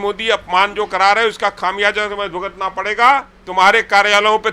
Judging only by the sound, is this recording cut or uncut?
cut